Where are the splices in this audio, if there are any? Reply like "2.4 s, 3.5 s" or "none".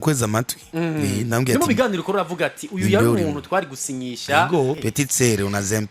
4.8 s